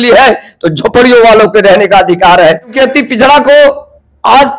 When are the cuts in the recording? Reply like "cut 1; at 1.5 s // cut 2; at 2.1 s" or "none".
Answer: cut 1; at 2.7 s